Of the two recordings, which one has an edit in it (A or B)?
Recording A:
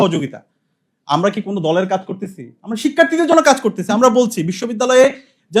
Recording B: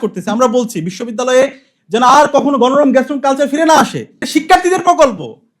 B